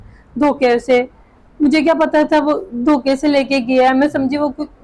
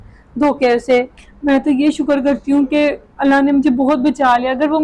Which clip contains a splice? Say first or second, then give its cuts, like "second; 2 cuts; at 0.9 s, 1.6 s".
second; 1 cut; at 1.2 s